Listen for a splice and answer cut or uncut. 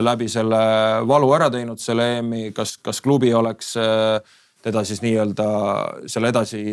uncut